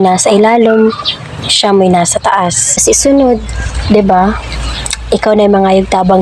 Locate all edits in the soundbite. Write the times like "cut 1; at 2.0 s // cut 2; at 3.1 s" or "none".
cut 1; at 2.8 s